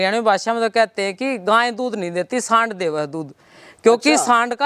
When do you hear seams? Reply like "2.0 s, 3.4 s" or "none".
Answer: none